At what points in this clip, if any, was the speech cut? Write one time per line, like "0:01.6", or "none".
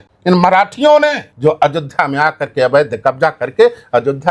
none